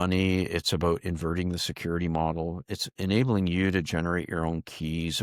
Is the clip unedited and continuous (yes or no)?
yes